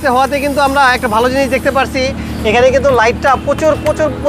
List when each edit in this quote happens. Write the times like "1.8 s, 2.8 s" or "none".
none

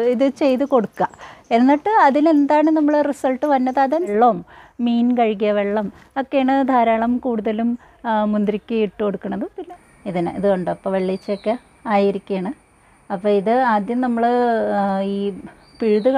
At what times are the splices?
4.1 s, 9.6 s

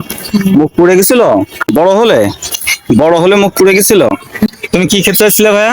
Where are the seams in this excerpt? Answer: 1.7 s, 4.5 s

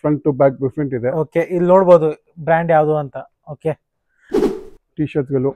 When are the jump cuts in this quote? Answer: 4.5 s

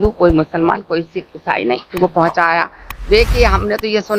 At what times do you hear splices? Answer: 1.9 s

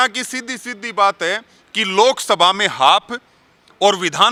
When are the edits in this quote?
none

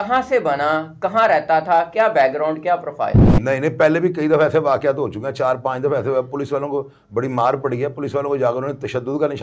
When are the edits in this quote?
3.3 s

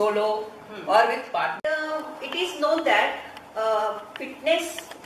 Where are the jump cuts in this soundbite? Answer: 1.6 s

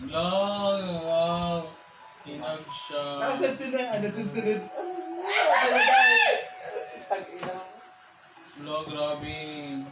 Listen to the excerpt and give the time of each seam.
none

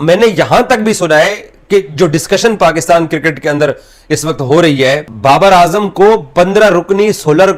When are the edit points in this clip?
none

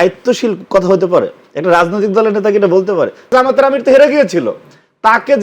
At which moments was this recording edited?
3.3 s

